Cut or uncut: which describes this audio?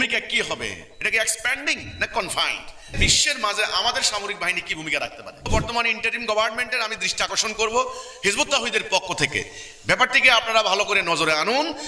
cut